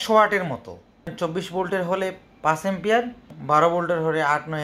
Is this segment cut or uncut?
cut